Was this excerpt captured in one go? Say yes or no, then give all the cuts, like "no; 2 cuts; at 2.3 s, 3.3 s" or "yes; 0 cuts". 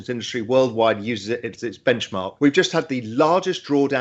yes; 0 cuts